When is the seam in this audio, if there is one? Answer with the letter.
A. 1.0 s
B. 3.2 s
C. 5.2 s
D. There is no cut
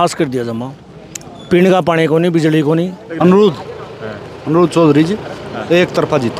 B